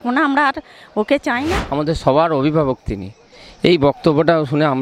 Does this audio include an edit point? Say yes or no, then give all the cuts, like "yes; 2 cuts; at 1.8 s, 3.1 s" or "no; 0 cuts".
yes; 1 cut; at 1.6 s